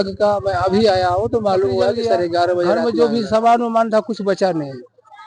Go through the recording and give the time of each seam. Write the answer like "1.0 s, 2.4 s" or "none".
2.8 s